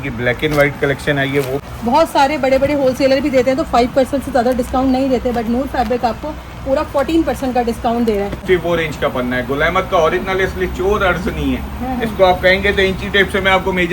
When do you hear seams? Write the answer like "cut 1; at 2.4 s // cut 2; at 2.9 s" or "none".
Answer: cut 1; at 1.6 s // cut 2; at 8.4 s